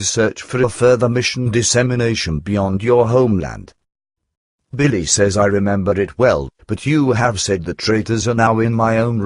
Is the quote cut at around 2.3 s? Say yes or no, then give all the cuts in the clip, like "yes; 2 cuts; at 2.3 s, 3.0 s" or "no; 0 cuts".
no; 1 cut; at 7.7 s